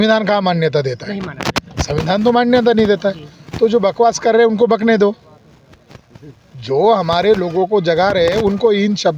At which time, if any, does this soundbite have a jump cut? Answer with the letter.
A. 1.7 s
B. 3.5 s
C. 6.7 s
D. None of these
D